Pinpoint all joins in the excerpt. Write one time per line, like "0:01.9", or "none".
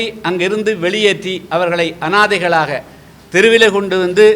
none